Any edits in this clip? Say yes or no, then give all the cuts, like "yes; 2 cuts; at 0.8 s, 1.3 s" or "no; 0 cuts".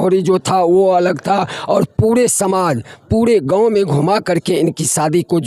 no; 0 cuts